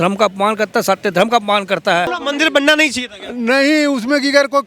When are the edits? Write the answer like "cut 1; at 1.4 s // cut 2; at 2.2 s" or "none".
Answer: cut 1; at 2.2 s